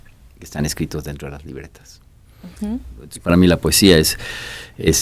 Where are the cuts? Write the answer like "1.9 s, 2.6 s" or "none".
3.0 s